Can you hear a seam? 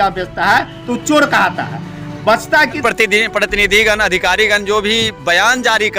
yes; 1 cut; at 2.8 s

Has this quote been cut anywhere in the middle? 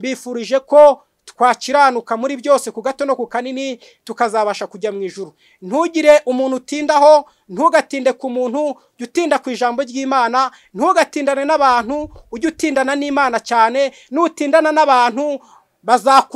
no; 0 cuts

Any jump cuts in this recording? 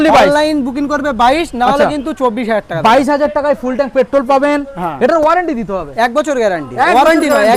no; 0 cuts

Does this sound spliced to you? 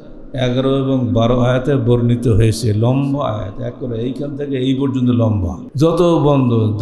yes; 1 cut; at 5.6 s

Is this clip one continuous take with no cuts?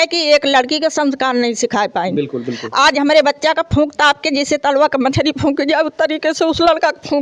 yes; 0 cuts

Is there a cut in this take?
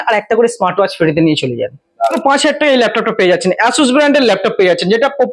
yes; 1 cut; at 2.2 s

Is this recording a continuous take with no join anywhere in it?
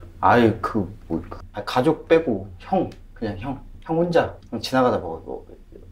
no; 1 cut; at 1.4 s

